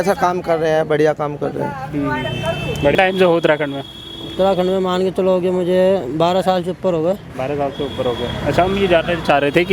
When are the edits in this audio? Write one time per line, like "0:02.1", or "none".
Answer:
none